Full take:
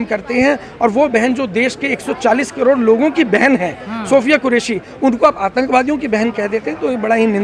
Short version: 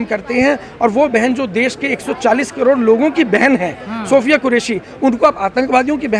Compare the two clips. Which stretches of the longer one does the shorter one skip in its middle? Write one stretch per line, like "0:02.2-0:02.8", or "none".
none